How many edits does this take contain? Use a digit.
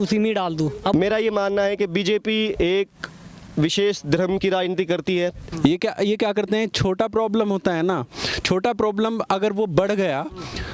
2